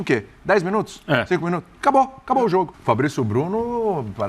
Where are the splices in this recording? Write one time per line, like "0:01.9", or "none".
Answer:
0:02.8